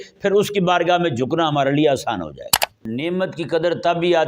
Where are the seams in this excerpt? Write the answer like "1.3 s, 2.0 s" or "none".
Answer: 2.9 s